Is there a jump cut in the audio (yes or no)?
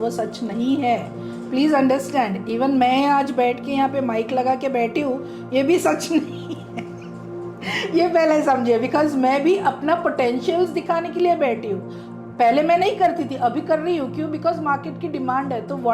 no